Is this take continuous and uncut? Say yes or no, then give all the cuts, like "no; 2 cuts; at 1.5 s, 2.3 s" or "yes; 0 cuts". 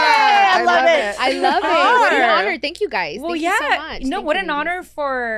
yes; 0 cuts